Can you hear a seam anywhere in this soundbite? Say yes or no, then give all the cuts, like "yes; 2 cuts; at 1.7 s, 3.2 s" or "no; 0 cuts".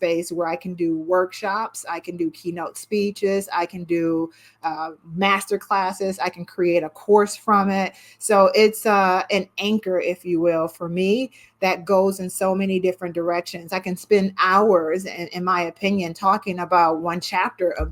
no; 0 cuts